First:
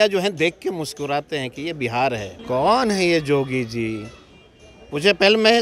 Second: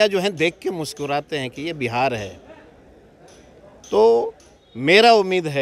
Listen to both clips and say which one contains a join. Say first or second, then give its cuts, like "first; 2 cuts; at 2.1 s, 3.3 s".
first; 1 cut; at 2.3 s